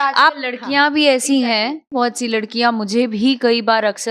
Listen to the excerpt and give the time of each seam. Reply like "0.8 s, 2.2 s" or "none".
1.9 s